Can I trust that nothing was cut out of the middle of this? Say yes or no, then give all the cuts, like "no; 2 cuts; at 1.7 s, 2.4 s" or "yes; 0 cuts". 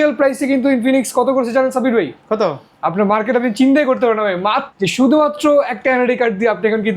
no; 1 cut; at 4.7 s